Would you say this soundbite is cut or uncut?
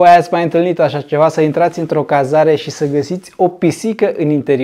uncut